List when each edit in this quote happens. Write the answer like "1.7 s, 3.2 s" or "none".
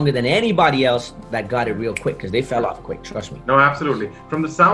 none